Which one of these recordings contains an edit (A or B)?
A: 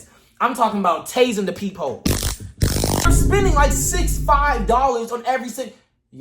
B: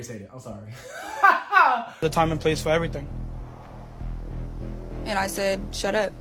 A